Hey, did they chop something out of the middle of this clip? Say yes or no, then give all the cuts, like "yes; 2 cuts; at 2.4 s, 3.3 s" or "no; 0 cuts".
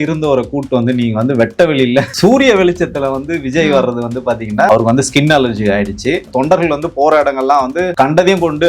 yes; 4 cuts; at 2.1 s, 4.7 s, 6.3 s, 7.9 s